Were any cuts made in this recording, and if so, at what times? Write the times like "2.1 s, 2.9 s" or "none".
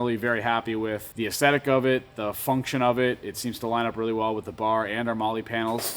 1.1 s